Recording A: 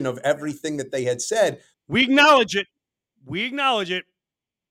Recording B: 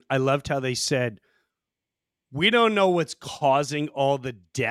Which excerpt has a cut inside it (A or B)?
A